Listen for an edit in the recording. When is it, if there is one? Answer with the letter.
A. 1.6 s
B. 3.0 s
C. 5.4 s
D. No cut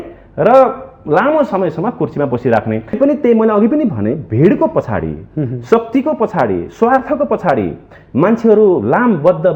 B